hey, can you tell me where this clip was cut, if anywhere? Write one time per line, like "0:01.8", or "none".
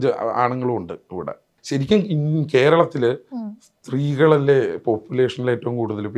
0:01.6